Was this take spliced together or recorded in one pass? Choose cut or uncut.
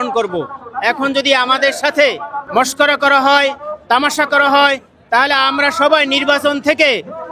cut